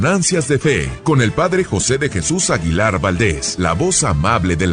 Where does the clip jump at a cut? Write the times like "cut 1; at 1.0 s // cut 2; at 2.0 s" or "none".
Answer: cut 1; at 0.9 s // cut 2; at 3.5 s